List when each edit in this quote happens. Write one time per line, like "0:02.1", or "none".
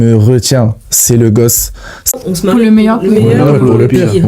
0:02.1